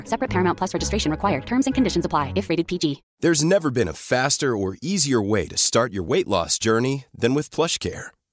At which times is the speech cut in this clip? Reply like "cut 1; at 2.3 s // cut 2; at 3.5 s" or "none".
cut 1; at 3.1 s